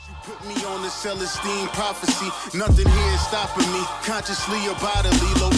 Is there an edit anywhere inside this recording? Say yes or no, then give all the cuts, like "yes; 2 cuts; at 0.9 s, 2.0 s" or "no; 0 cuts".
no; 0 cuts